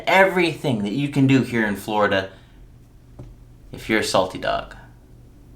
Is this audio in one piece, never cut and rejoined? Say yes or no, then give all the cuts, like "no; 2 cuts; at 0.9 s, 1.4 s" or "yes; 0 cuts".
yes; 0 cuts